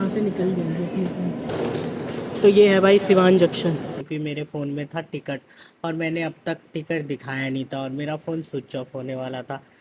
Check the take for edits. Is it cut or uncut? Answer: cut